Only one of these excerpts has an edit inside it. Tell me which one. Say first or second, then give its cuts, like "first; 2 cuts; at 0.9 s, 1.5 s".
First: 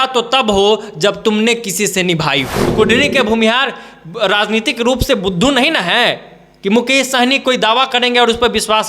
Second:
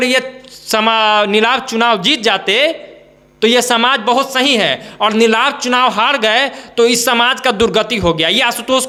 first; 1 cut; at 2.6 s